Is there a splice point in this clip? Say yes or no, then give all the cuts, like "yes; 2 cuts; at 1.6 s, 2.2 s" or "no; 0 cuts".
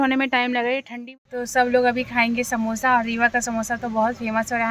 yes; 1 cut; at 1.0 s